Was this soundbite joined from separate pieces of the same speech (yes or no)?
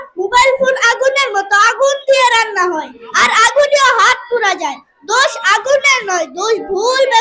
no